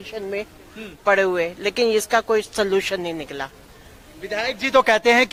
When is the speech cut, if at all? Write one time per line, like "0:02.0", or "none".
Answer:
none